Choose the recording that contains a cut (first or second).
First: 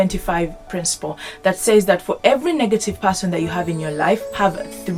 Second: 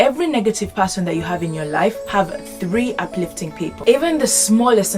second